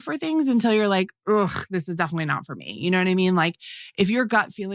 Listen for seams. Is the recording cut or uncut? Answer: uncut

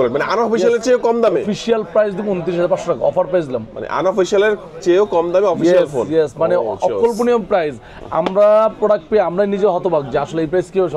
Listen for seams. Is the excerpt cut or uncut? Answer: uncut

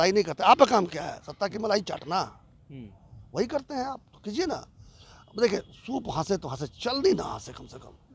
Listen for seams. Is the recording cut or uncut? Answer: uncut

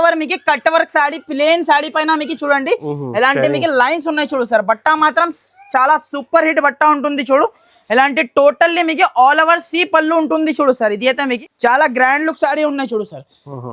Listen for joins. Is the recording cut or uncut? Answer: cut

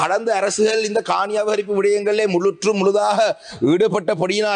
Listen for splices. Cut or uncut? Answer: uncut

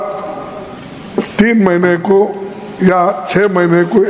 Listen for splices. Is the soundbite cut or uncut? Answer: uncut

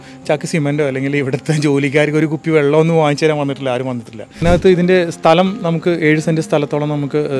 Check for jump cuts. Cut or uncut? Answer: cut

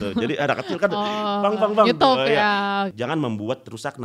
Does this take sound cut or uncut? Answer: cut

